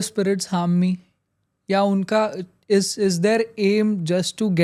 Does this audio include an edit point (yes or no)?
no